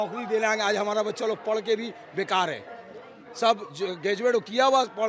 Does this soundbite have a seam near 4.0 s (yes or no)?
no